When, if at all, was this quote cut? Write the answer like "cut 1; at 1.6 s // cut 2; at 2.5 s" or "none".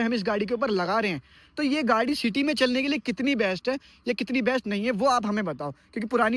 none

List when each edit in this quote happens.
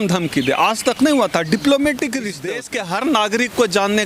cut 1; at 2.4 s

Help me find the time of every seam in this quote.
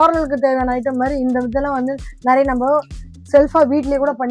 none

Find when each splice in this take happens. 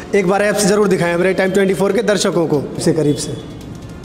cut 1; at 2.8 s

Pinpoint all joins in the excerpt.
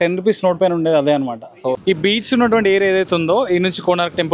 cut 1; at 1.8 s

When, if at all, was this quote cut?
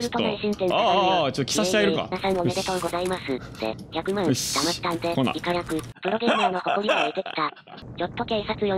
cut 1; at 5.9 s // cut 2; at 7.7 s

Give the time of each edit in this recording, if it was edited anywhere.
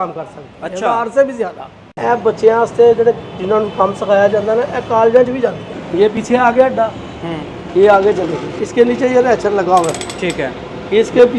cut 1; at 1.9 s // cut 2; at 6.0 s // cut 3; at 8.6 s

